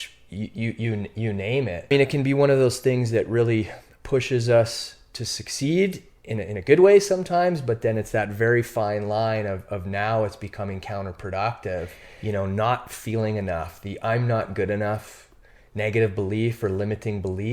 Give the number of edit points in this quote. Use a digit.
2